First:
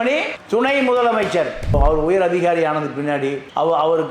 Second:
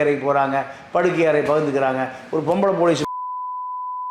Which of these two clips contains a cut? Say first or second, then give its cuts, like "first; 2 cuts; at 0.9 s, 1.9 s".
first; 1 cut; at 1.8 s